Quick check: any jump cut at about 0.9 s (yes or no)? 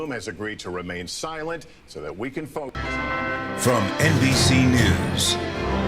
no